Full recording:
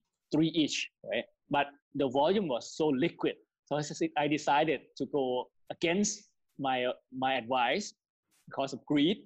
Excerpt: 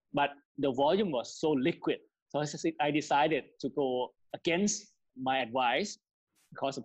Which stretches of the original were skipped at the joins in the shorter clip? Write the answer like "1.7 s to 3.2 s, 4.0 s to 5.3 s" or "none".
6.5 s to 7.0 s